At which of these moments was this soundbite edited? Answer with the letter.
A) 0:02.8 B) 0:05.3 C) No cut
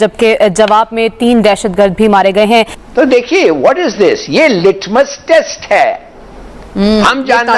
A